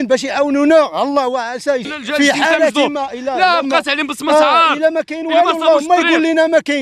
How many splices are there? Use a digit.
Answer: 1